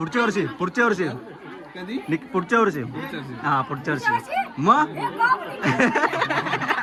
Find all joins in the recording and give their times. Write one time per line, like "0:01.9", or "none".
none